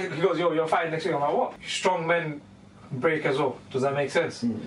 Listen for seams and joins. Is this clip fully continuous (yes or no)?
no